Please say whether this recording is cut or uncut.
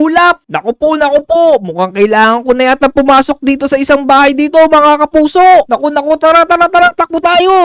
uncut